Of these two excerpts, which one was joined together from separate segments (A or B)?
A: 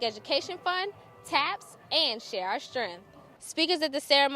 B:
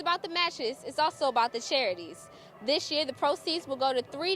A